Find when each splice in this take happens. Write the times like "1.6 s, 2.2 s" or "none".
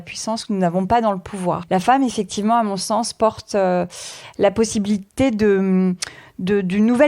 1.6 s